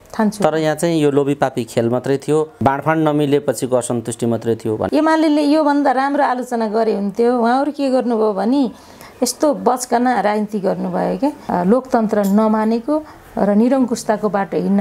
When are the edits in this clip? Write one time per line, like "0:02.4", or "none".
0:02.5
0:04.9
0:11.4

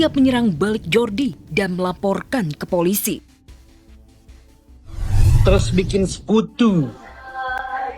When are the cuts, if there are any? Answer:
0:03.2
0:05.0

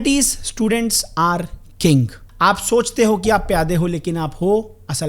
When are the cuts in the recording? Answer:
0:02.2

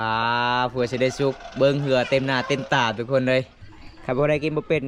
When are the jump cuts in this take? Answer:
0:03.6

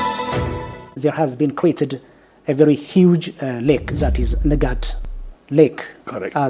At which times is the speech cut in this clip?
0:00.9

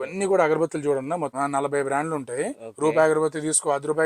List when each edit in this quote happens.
0:01.3

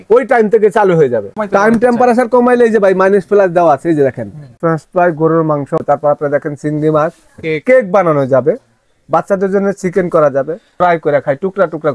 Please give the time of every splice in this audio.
0:01.3
0:04.5
0:05.8

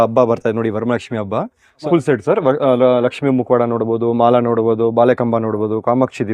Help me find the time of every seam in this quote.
0:01.8

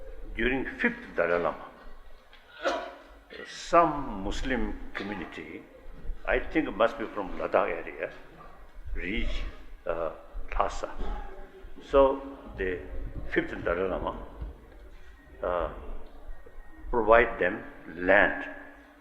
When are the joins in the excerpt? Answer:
0:15.4

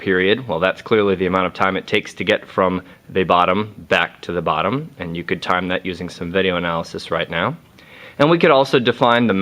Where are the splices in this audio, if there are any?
0:05.2

